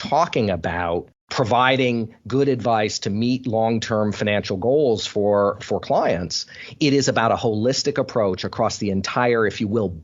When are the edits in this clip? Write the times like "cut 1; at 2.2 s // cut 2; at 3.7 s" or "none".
cut 1; at 1.2 s